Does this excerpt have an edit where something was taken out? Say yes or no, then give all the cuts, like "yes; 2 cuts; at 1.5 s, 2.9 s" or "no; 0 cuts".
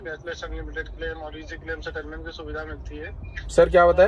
no; 0 cuts